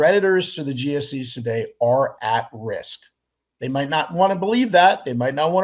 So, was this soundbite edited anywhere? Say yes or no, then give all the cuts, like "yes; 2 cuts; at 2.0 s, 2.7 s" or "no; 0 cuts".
no; 0 cuts